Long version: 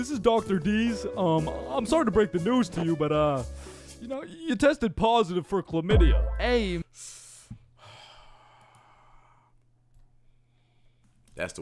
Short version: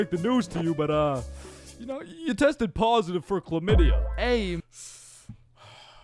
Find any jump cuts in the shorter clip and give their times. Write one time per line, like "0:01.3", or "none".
none

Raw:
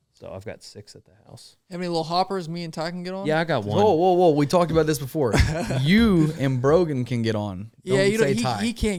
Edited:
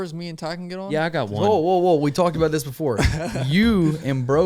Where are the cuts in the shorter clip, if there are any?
none

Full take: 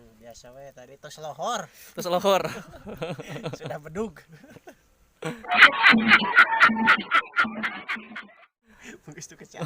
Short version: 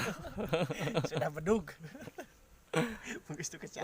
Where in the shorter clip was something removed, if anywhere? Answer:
0:02.9

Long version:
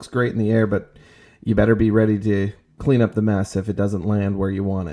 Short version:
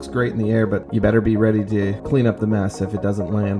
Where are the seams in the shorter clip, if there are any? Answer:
0:00.9
0:02.0

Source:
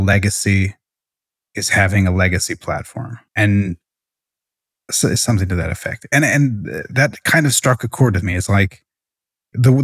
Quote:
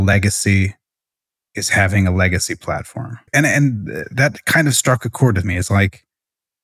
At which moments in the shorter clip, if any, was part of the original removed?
0:03.1

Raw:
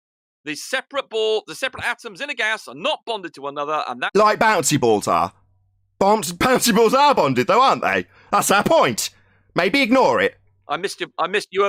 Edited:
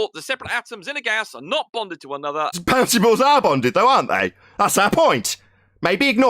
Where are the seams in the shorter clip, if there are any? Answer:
0:02.6

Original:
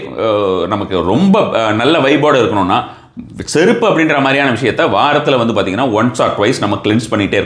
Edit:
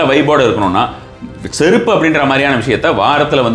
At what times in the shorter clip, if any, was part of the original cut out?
none

